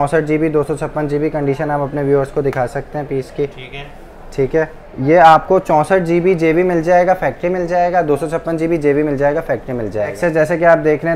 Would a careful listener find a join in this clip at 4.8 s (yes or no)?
yes